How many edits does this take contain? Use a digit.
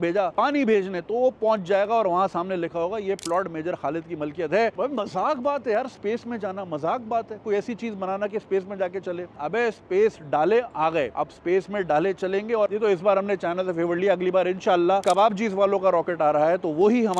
3